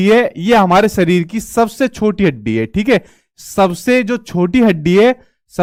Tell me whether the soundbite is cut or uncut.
uncut